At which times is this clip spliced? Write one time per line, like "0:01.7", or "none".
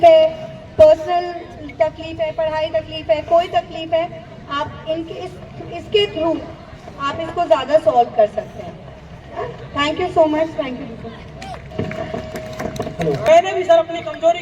0:13.3